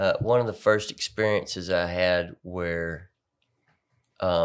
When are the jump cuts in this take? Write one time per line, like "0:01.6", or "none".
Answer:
none